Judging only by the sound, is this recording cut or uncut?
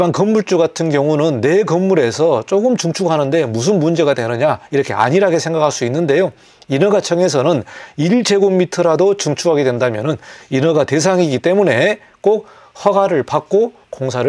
uncut